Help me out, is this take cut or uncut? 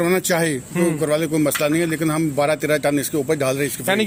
uncut